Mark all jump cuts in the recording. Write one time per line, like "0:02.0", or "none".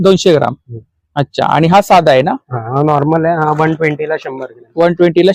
none